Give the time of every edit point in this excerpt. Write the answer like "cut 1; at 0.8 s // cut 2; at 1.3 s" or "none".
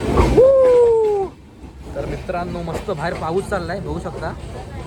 none